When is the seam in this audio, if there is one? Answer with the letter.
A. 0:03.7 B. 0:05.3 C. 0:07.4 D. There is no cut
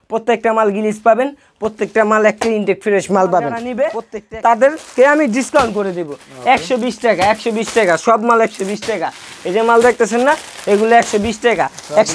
A